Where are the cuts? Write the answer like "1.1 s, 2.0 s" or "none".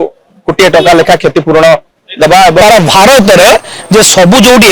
2.6 s